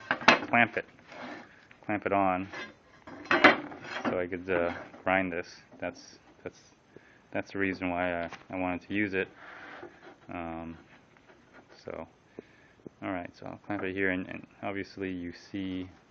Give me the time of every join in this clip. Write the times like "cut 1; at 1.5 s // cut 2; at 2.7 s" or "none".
cut 1; at 6.7 s